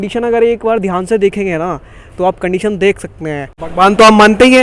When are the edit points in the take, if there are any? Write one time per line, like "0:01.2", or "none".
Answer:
0:03.5